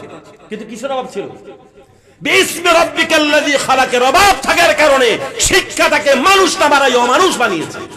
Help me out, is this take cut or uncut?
uncut